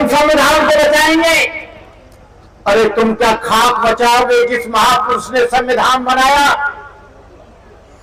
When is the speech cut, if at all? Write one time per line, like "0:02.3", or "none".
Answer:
none